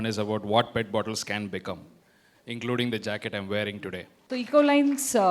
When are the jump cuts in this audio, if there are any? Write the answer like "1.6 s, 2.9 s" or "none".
4.1 s